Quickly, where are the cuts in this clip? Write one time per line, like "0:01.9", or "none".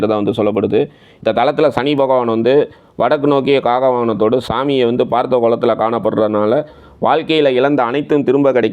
none